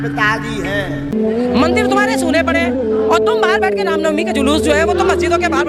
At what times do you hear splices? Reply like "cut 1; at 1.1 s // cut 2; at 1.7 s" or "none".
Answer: cut 1; at 1.1 s